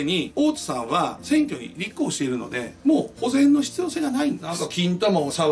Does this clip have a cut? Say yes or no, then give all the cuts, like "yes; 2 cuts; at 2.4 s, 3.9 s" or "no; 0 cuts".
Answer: yes; 1 cut; at 4.6 s